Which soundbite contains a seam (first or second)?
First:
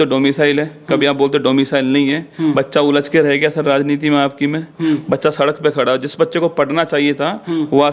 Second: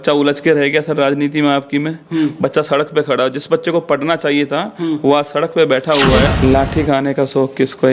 second